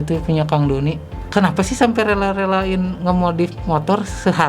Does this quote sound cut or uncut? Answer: cut